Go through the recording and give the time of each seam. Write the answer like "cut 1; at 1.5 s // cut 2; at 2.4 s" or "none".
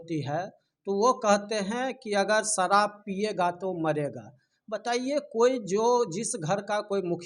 none